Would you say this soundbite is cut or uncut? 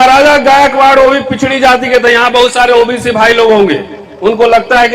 uncut